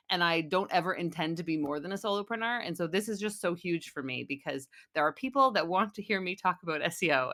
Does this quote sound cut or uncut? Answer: uncut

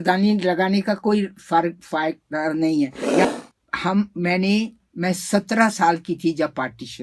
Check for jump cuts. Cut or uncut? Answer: cut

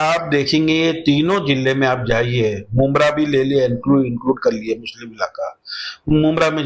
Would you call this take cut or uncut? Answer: uncut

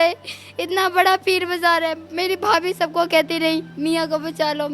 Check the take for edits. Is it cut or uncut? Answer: cut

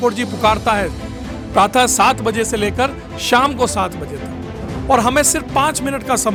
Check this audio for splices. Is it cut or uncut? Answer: uncut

